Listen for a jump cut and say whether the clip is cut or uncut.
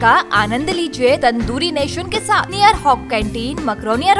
cut